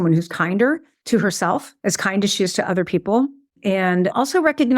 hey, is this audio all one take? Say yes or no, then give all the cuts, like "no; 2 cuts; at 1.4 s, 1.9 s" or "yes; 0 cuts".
no; 3 cuts; at 0.9 s, 1.7 s, 3.5 s